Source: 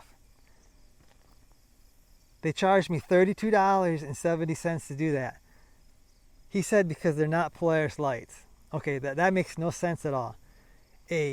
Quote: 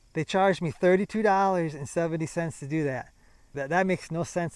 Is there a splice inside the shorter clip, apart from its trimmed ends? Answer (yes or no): yes